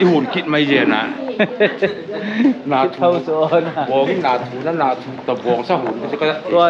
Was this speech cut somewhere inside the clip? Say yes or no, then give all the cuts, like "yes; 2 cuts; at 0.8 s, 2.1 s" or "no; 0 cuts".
no; 0 cuts